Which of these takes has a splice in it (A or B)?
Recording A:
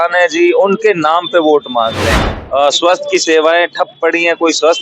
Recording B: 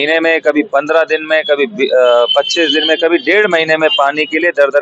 A